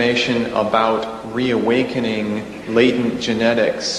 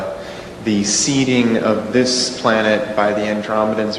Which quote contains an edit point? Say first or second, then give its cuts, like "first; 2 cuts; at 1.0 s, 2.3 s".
second; 1 cut; at 1.1 s